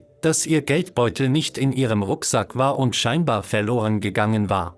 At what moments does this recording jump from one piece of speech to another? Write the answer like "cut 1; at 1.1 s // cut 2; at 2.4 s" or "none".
none